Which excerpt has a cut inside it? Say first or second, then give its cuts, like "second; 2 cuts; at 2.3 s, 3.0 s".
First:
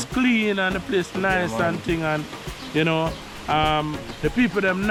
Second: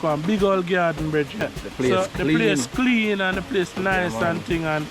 second; 1 cut; at 1.4 s